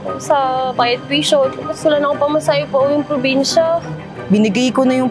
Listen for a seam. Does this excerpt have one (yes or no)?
yes